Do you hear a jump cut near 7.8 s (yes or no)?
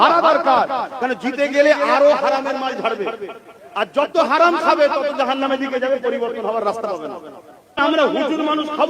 yes